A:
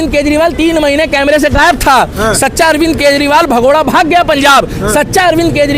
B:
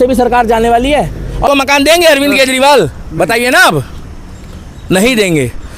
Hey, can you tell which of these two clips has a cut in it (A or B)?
B